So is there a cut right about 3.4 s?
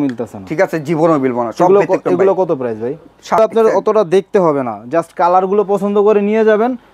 yes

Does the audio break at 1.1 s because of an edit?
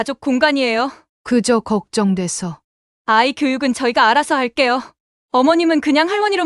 yes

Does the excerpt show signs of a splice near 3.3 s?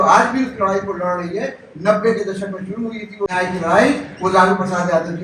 yes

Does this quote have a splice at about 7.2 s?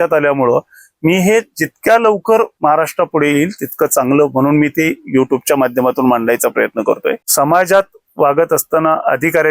yes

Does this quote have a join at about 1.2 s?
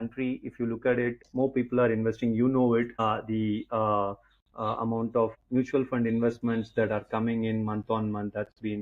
yes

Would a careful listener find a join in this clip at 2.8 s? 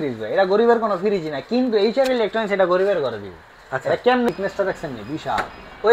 no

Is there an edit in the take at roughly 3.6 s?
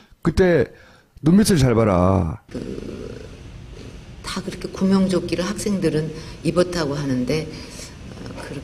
yes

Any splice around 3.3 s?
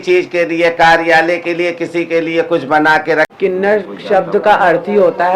yes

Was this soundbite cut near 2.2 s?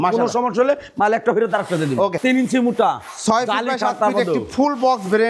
yes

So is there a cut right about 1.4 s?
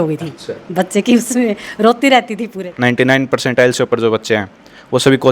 no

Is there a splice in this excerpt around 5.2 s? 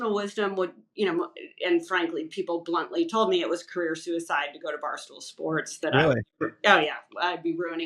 no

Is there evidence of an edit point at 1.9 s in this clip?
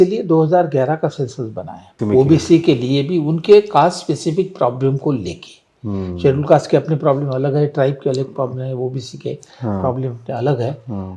yes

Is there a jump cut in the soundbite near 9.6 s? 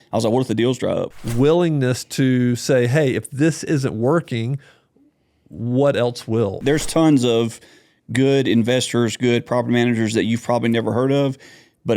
no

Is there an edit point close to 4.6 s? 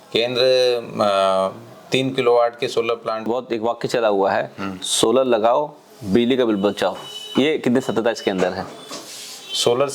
no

